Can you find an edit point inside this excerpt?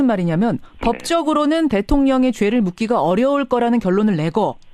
no; 0 cuts

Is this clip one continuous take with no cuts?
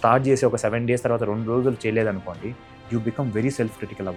yes; 0 cuts

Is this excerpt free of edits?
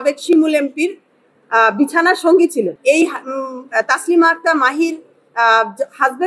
no; 1 cut; at 2.7 s

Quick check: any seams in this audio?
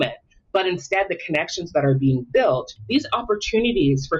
yes; 1 cut; at 2.7 s

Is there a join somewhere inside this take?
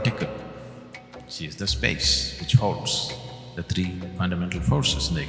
yes; 1 cut; at 4.1 s

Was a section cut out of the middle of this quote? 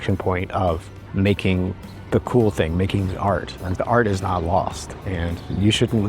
yes; 2 cuts; at 1.0 s, 1.9 s

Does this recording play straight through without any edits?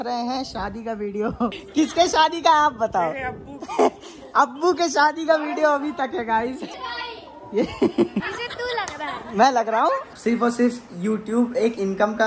no; 4 cuts; at 1.6 s, 6.7 s, 8.4 s, 10.1 s

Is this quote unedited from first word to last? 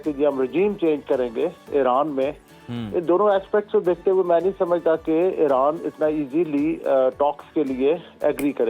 yes; 0 cuts

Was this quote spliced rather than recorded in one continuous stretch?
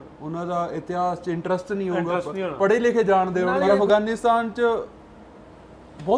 yes; 1 cut; at 3.5 s

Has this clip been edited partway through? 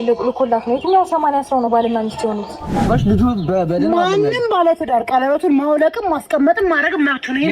yes; 1 cut; at 2.9 s

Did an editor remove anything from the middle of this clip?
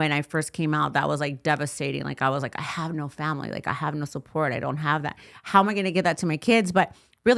no; 0 cuts

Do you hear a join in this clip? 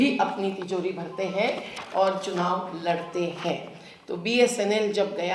no; 0 cuts

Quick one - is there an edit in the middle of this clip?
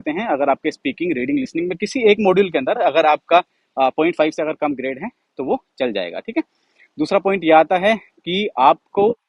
no; 0 cuts

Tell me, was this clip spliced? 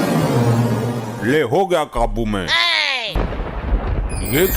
yes; 1 cut; at 3.2 s

